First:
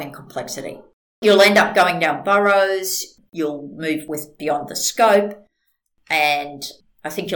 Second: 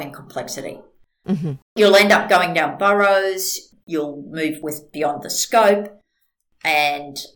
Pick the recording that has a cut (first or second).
first